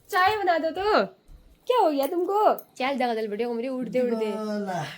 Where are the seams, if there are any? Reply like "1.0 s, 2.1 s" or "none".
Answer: 2.7 s